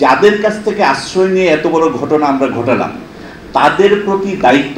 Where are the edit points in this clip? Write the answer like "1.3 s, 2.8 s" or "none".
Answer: none